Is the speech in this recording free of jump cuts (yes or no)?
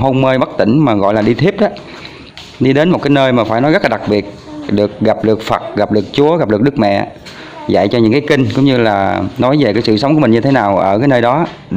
yes